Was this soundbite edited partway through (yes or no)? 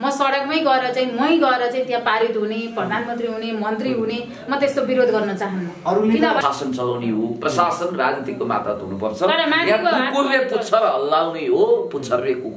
yes